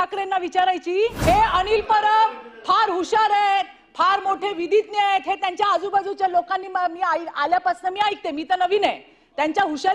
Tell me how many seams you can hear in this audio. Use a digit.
1